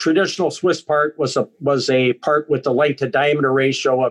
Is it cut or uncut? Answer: uncut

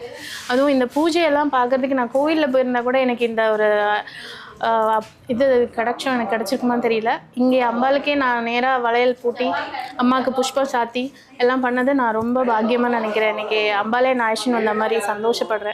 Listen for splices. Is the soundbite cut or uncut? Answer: uncut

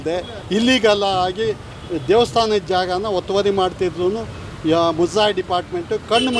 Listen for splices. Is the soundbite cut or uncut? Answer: uncut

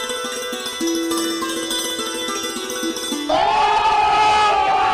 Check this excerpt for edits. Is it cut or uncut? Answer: uncut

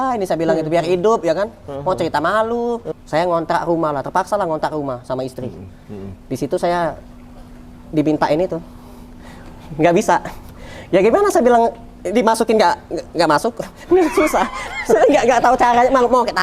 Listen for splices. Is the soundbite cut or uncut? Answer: cut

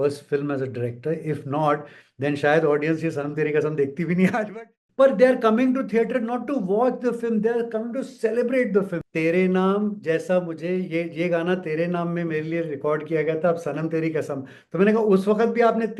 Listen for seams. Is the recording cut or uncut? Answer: cut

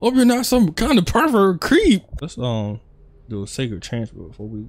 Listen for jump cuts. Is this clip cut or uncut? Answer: cut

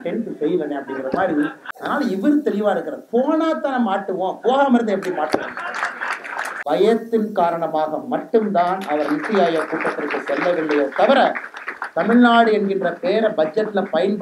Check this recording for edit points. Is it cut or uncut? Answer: cut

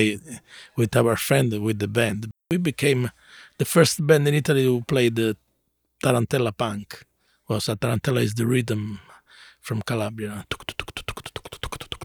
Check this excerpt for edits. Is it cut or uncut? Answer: cut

